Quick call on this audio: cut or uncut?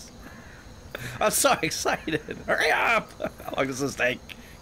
uncut